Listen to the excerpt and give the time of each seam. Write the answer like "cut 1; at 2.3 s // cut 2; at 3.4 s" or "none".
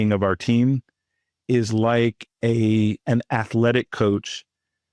cut 1; at 3.0 s